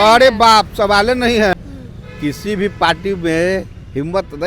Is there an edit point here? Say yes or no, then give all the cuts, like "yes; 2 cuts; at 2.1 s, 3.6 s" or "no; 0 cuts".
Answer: yes; 1 cut; at 1.5 s